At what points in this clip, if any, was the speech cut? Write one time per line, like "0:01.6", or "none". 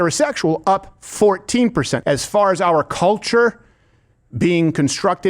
0:02.0